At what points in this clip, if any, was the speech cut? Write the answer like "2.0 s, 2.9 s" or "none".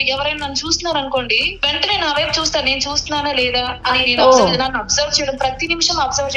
1.5 s